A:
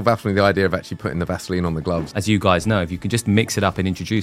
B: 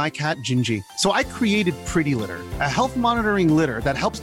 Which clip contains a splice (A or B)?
A